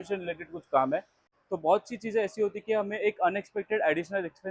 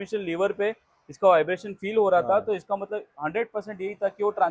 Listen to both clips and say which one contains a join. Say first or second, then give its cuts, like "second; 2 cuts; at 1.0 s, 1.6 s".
first; 1 cut; at 1.3 s